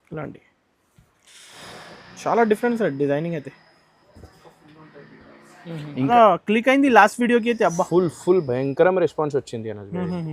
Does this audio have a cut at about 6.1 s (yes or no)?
yes